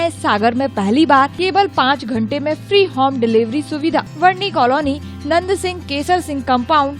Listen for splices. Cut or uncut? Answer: cut